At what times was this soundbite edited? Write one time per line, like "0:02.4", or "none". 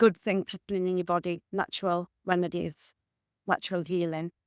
0:01.4

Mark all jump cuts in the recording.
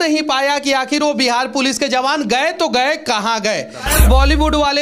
0:03.9

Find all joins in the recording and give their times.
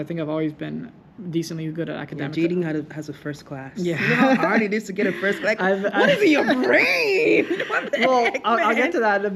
none

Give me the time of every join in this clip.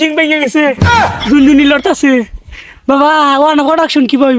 none

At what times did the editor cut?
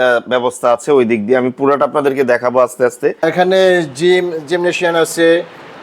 0:03.2

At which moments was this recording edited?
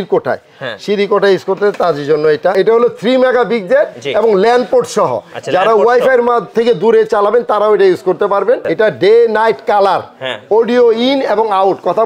0:02.5
0:08.7

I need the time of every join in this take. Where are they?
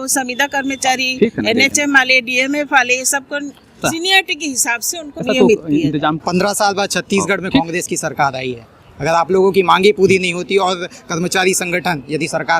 0:03.7
0:05.2
0:06.2

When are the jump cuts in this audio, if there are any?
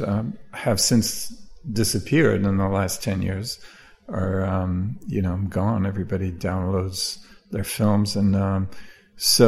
none

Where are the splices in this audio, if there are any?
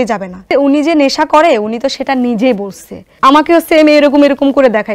0:03.1

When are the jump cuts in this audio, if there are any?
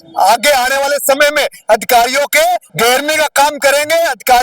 0:02.7

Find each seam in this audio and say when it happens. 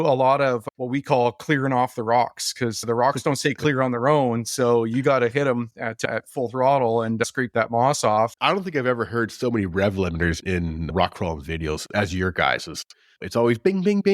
0:08.3

